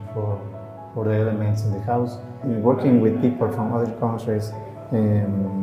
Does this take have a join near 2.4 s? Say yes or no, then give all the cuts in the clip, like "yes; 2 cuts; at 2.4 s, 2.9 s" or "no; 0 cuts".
yes; 1 cut; at 2.4 s